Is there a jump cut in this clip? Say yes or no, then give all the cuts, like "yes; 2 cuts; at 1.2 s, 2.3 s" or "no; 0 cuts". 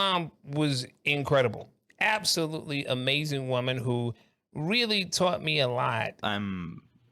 yes; 1 cut; at 6.1 s